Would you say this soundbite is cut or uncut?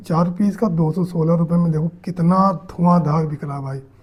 uncut